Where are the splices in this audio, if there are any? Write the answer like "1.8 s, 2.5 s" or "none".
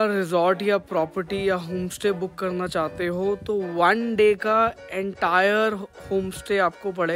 none